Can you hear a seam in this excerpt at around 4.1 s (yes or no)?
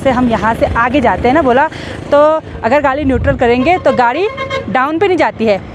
no